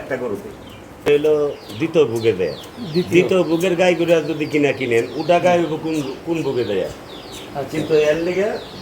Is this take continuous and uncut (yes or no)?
no